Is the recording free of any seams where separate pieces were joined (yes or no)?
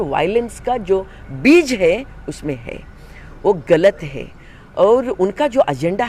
yes